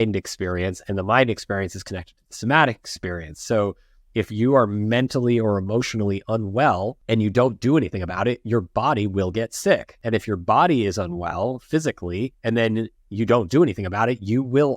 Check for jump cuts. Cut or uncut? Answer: cut